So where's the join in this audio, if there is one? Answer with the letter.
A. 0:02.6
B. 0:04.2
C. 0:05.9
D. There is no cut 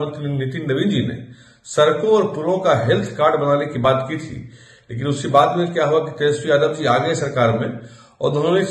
D